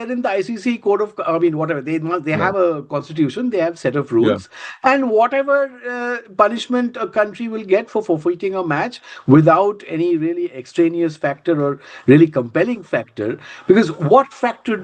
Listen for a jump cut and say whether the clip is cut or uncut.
uncut